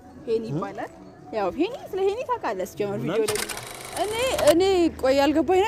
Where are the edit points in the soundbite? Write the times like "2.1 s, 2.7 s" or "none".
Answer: 4.1 s